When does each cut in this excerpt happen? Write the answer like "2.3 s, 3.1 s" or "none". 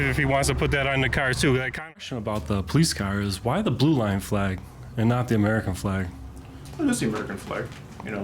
1.8 s